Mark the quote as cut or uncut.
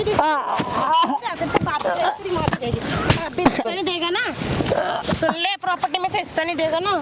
cut